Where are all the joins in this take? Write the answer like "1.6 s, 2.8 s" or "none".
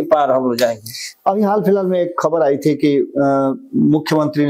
none